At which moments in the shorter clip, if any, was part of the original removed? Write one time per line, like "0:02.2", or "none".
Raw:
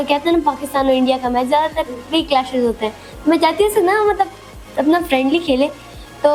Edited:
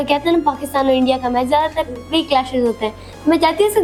none